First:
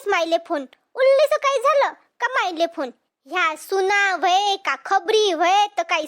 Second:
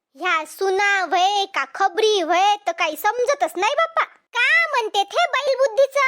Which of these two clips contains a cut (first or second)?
second